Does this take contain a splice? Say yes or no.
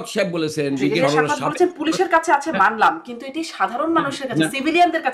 yes